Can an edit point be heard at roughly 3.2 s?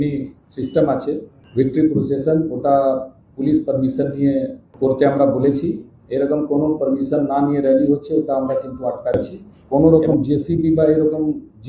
no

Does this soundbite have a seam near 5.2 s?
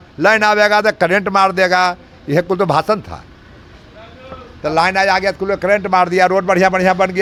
no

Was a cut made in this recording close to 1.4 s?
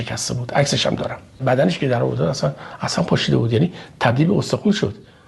yes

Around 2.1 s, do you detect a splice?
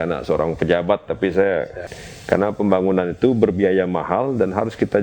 yes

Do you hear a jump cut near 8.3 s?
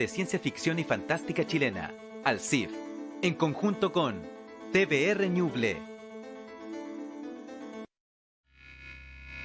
yes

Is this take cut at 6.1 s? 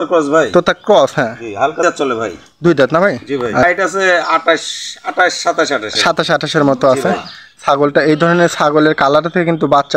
no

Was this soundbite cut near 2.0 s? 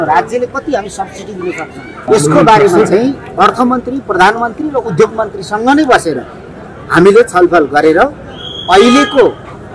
yes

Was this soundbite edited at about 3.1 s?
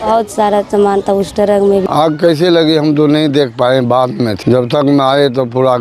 no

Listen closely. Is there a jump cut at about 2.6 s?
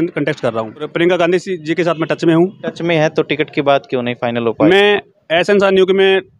yes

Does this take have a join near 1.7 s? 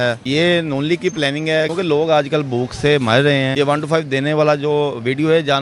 yes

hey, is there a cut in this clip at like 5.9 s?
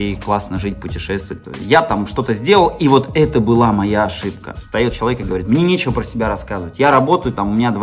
no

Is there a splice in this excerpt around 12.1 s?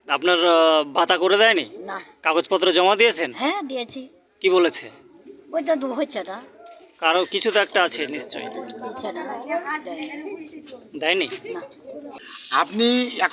yes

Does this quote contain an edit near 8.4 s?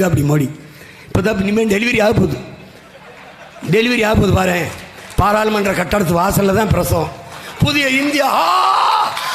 no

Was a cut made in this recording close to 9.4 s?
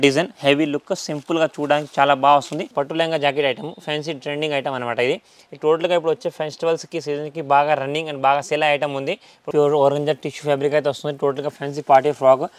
yes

